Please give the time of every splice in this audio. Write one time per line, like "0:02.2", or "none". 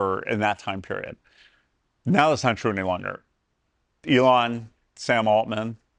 none